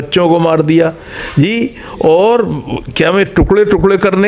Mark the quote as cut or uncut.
uncut